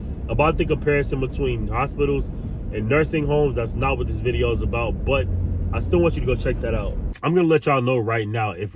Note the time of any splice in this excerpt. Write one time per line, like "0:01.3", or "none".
0:07.0